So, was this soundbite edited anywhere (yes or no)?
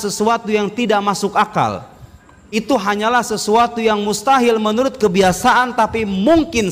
no